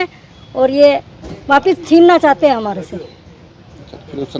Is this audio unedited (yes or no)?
yes